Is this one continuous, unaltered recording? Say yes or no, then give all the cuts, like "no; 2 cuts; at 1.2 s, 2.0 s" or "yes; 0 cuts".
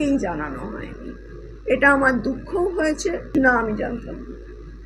yes; 0 cuts